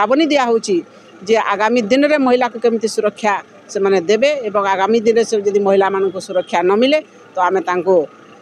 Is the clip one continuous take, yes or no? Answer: yes